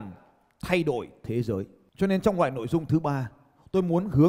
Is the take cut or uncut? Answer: cut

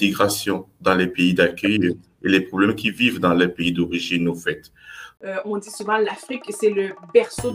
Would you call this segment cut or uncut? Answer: cut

